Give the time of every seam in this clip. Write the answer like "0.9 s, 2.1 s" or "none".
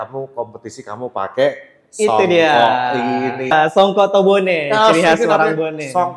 3.5 s